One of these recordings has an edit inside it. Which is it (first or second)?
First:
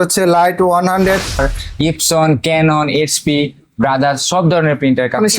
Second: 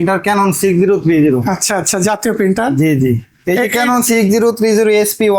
first